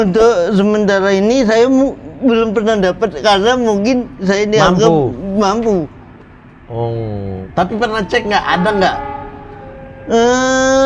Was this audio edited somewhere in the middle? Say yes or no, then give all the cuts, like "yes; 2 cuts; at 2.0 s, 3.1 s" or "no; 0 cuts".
no; 0 cuts